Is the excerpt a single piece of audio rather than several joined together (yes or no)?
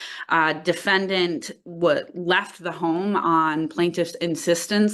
yes